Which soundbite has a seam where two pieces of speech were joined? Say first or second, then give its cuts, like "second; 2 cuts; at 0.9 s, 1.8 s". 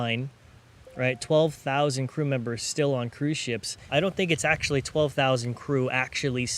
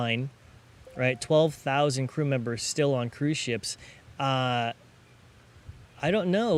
first; 1 cut; at 3.8 s